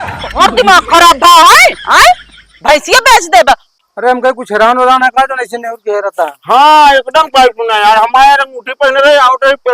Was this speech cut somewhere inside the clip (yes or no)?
yes